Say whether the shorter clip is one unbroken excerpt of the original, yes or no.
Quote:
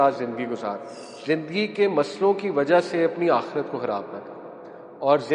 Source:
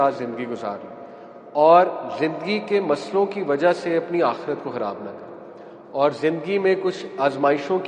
no